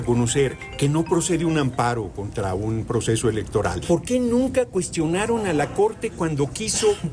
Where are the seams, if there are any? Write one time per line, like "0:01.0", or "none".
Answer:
0:03.8